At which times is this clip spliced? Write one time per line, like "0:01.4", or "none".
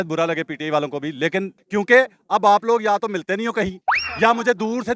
0:01.6